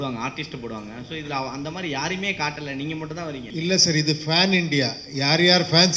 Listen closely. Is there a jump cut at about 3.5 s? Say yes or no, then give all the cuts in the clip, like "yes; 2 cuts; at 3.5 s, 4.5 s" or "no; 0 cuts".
yes; 1 cut; at 3.5 s